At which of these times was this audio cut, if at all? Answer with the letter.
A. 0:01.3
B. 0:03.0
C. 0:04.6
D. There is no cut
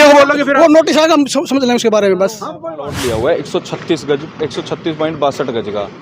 B